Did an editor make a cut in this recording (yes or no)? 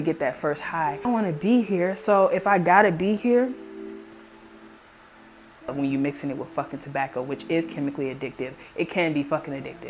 yes